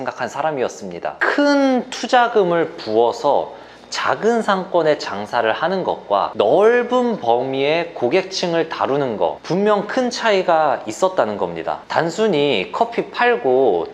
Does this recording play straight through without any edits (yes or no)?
no